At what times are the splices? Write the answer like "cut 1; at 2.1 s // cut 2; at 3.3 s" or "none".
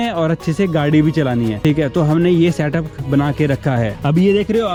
none